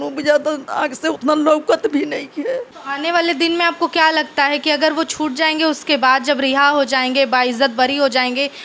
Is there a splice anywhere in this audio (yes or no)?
yes